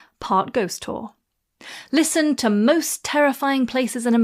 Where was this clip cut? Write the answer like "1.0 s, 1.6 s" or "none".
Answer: none

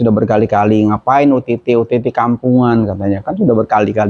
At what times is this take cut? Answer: none

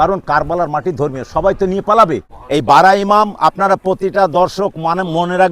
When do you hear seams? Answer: 2.3 s

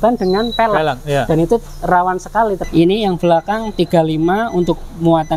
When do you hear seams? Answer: 2.6 s

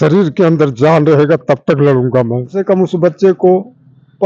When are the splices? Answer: 2.6 s

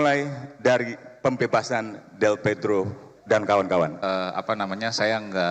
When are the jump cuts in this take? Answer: 4.0 s

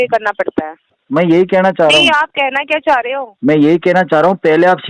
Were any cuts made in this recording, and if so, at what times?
0.9 s

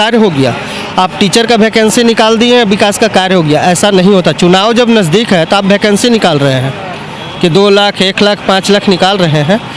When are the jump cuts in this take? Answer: none

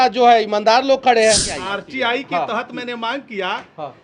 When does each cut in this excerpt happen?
1.5 s

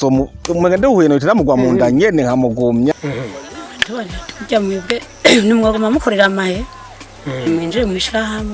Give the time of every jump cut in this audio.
2.9 s

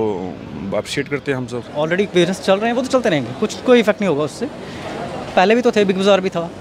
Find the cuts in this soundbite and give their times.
1.6 s

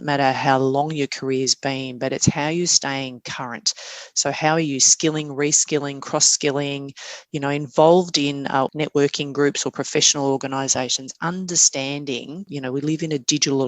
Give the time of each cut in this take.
8.7 s, 12.5 s

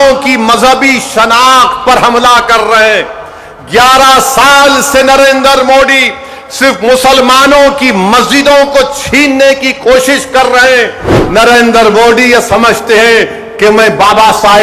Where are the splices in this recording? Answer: 11.1 s

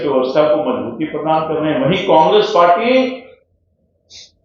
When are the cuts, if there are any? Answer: none

